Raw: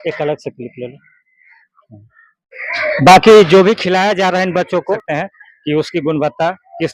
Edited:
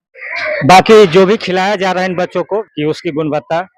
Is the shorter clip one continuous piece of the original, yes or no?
no